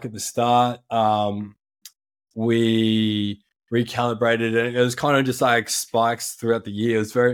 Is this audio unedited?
yes; 0 cuts

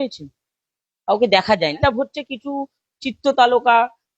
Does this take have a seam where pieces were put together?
yes; 1 cut; at 1.8 s

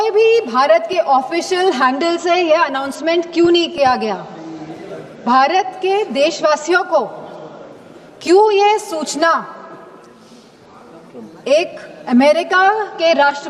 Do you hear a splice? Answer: no; 0 cuts

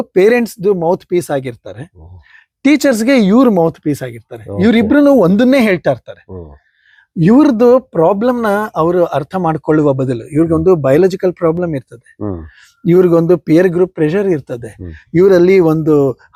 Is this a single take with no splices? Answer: yes; 0 cuts

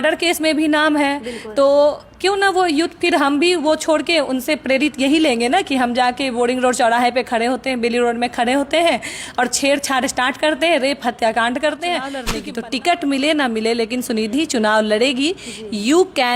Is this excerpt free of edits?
no; 1 cut; at 12.3 s

